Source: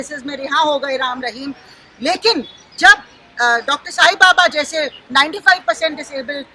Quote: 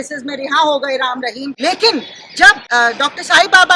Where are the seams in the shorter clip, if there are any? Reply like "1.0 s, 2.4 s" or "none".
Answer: 1.5 s, 2.6 s